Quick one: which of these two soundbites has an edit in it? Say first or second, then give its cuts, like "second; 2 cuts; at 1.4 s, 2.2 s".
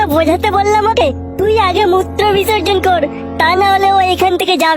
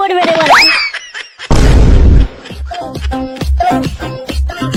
first; 1 cut; at 1.0 s